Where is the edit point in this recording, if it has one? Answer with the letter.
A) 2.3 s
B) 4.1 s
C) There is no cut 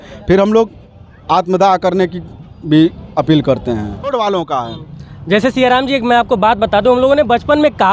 B